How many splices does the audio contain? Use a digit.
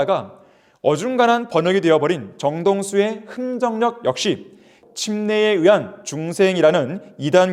1